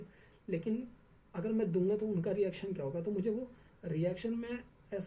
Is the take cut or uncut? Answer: uncut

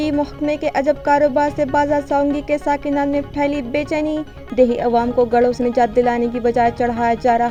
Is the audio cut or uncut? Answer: uncut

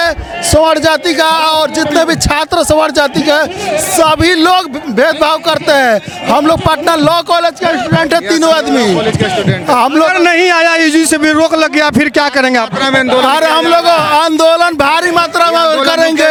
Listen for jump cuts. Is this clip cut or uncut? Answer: uncut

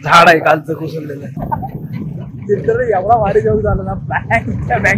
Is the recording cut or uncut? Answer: cut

